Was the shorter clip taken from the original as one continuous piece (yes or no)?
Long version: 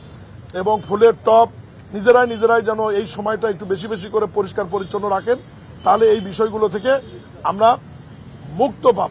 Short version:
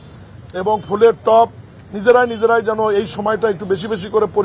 yes